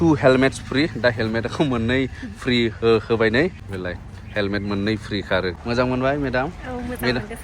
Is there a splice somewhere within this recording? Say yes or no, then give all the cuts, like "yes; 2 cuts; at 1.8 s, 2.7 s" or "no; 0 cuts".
yes; 2 cuts; at 3.7 s, 5.5 s